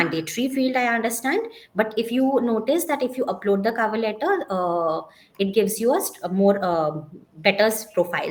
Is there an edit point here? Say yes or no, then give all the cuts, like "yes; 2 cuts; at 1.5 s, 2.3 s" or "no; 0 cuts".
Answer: no; 0 cuts